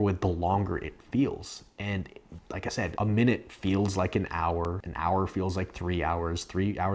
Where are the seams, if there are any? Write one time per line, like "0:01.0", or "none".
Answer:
0:04.8